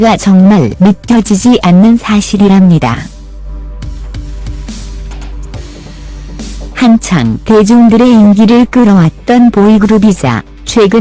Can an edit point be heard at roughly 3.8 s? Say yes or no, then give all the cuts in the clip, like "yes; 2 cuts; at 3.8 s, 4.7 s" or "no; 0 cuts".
no; 0 cuts